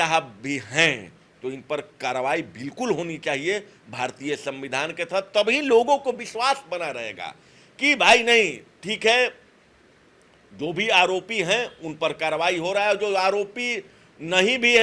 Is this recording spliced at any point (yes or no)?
no